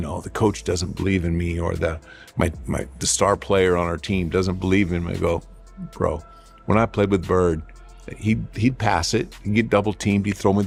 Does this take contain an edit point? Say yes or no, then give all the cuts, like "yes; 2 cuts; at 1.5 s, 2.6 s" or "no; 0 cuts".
no; 0 cuts